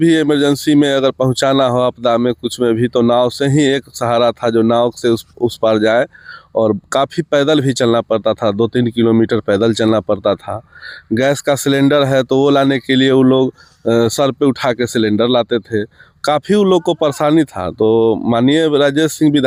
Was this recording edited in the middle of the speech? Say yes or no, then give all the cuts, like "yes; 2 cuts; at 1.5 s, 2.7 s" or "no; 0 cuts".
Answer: no; 0 cuts